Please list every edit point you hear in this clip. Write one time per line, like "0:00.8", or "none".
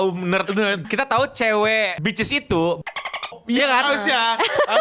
0:00.8
0:01.9